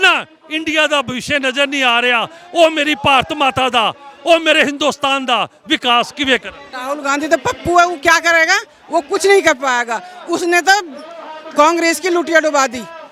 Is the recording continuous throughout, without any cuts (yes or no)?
no